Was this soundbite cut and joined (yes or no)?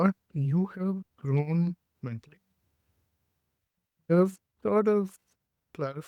yes